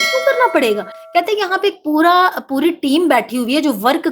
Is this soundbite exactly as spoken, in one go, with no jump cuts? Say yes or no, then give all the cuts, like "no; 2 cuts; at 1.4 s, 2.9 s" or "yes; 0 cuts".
yes; 0 cuts